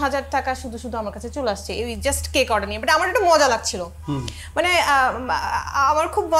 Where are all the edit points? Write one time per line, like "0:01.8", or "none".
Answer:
none